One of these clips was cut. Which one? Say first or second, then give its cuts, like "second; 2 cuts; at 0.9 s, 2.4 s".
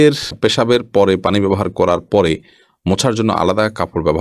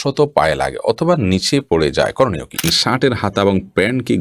second; 1 cut; at 2.7 s